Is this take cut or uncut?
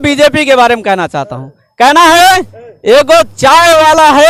uncut